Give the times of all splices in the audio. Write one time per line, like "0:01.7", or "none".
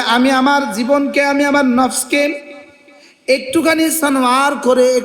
none